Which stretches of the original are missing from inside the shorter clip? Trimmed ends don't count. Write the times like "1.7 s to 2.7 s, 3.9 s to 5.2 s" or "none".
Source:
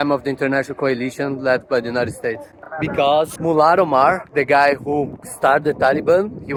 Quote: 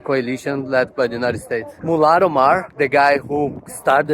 2.5 s to 3.3 s